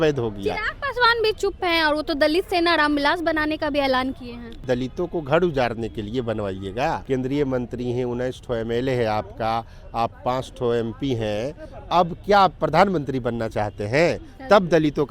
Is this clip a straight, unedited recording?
no; 2 cuts; at 4.6 s, 7.0 s

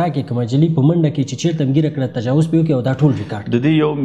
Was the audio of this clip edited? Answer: no; 0 cuts

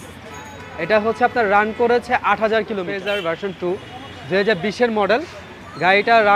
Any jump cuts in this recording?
yes; 1 cut; at 2.9 s

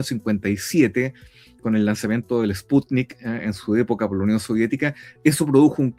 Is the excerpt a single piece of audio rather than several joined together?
yes; 0 cuts

